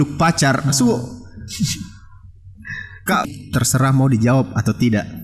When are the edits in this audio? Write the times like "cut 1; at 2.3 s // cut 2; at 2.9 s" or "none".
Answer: cut 1; at 3.2 s